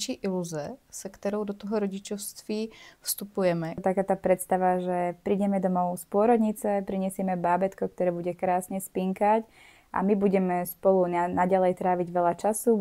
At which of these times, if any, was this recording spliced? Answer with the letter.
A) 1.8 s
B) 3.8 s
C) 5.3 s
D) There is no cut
B